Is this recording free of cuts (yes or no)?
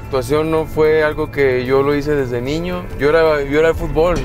no